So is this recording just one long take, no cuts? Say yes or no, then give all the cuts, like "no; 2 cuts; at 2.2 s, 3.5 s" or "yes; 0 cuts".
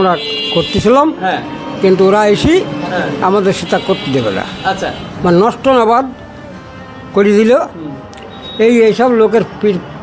yes; 0 cuts